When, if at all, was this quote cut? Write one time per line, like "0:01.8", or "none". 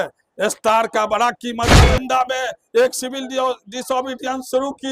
0:01.9